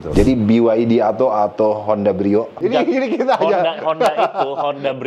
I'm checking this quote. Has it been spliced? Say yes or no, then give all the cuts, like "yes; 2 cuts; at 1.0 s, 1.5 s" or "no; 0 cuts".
yes; 1 cut; at 2.5 s